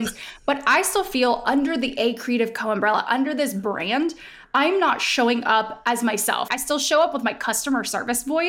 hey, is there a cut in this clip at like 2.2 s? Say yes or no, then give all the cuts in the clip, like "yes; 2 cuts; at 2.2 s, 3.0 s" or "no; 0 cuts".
no; 1 cut; at 6.5 s